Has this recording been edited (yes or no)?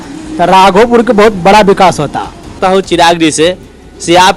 yes